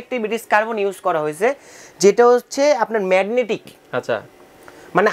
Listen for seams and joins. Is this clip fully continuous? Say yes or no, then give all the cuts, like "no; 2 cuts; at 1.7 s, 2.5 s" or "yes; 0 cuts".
yes; 0 cuts